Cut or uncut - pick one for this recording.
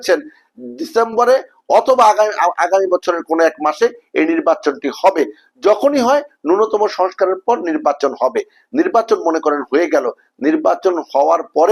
uncut